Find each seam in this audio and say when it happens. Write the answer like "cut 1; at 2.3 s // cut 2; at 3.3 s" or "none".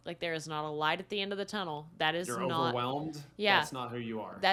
none